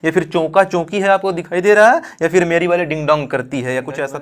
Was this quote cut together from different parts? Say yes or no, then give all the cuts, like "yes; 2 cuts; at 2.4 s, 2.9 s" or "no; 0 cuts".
no; 0 cuts